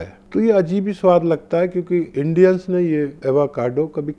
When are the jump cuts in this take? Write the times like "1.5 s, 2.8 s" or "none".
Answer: 2.1 s, 3.2 s